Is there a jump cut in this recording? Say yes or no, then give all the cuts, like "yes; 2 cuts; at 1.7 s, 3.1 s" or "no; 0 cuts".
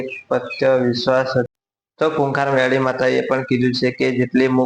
yes; 1 cut; at 1.5 s